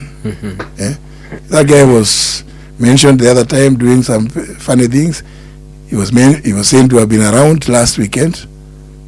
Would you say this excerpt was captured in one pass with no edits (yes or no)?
yes